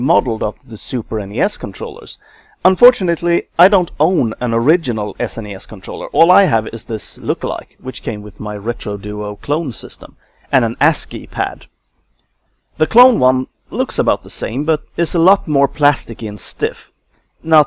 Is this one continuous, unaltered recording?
no; 1 cut; at 11.5 s

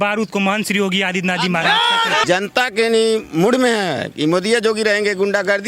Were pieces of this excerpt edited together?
yes; 1 cut; at 2.2 s

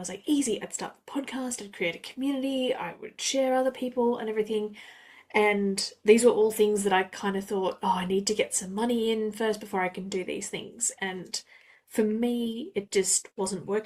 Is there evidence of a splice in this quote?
no; 0 cuts

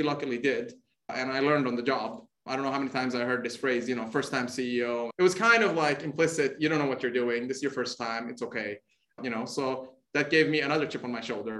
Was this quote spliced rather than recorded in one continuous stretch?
yes; 1 cut; at 5.1 s

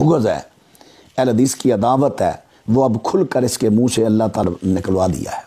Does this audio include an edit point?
yes; 1 cut; at 4.4 s

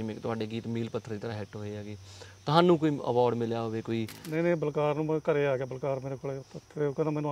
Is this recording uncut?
no; 1 cut; at 4.2 s

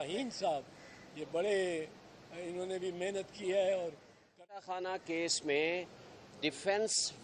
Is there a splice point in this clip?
yes; 1 cut; at 4.5 s

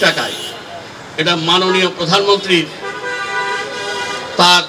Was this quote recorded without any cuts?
yes; 0 cuts

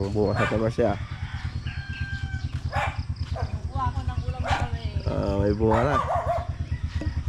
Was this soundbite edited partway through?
no; 0 cuts

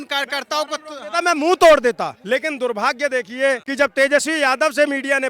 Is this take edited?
yes; 2 cuts; at 2.1 s, 3.7 s

